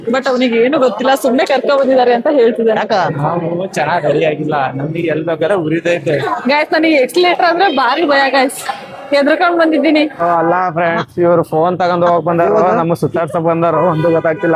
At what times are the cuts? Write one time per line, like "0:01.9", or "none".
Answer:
0:03.1
0:06.3
0:10.2